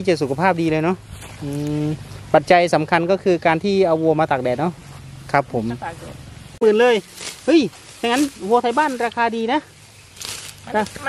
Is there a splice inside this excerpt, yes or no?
yes